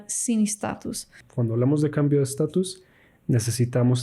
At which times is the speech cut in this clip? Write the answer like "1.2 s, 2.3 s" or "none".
1.2 s